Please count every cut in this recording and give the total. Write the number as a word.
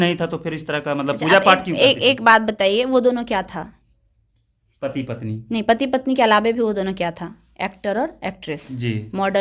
zero